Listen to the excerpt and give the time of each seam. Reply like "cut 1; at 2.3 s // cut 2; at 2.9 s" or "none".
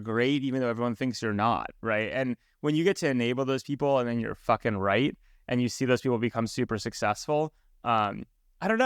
none

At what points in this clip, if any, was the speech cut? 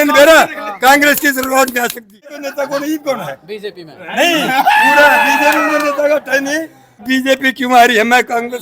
cut 1; at 2.4 s // cut 2; at 7.0 s

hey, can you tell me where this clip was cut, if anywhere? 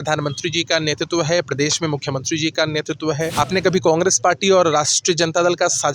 cut 1; at 3.3 s

